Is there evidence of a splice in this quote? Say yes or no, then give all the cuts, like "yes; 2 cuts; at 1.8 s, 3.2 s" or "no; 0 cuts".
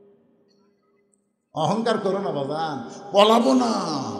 no; 0 cuts